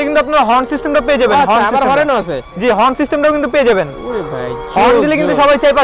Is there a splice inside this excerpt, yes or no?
no